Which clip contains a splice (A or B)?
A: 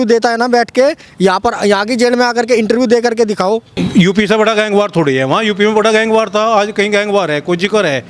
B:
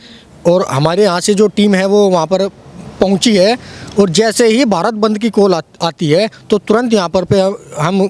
A